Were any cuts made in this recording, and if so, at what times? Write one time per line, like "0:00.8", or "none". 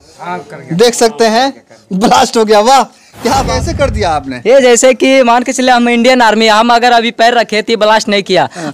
0:03.5